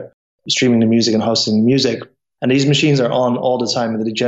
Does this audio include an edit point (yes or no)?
no